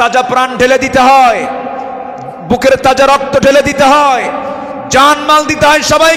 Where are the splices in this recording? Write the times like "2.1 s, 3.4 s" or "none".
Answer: none